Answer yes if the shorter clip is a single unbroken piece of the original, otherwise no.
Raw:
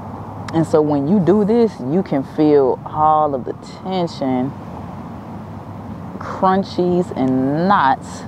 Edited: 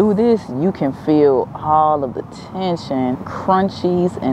no